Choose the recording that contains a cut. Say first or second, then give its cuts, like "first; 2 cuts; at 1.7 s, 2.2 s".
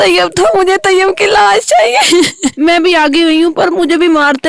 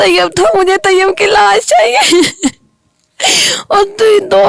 first; 1 cut; at 2.5 s